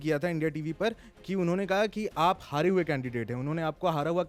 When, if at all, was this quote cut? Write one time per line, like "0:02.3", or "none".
none